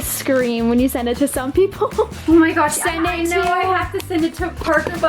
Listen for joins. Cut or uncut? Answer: uncut